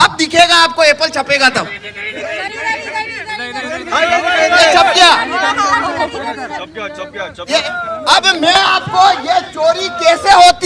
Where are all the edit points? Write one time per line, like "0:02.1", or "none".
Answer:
0:07.6